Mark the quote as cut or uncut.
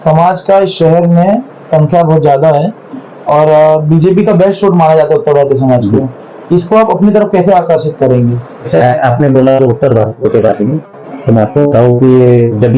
uncut